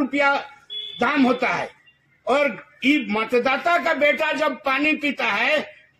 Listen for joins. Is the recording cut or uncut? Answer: uncut